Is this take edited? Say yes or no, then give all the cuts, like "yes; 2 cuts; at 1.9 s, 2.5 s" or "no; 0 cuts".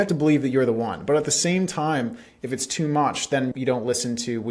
no; 0 cuts